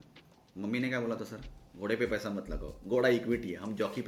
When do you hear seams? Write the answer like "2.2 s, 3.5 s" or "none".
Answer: none